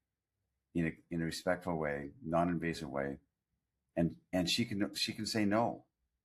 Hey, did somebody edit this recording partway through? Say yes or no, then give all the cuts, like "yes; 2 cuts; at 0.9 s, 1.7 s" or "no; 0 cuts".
no; 0 cuts